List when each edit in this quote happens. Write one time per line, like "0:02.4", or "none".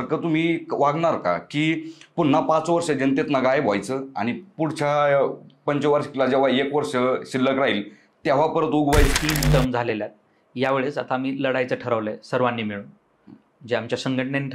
0:09.1